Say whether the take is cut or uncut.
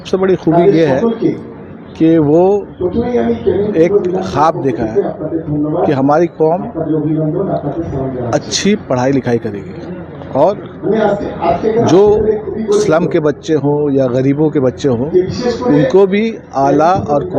uncut